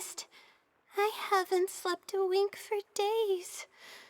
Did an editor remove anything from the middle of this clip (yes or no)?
no